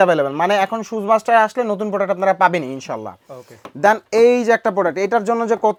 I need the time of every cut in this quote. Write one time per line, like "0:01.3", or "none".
none